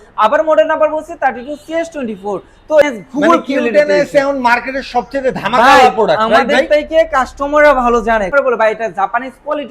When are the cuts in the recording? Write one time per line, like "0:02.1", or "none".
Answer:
0:02.8
0:08.3